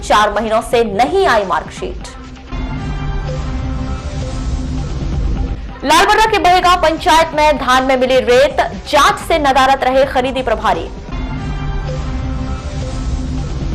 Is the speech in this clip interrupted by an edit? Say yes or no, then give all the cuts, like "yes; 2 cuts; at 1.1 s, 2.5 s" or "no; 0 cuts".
no; 0 cuts